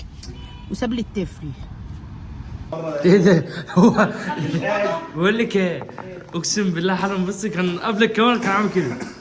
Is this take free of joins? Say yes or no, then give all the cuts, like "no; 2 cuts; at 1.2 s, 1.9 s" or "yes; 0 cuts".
no; 1 cut; at 2.7 s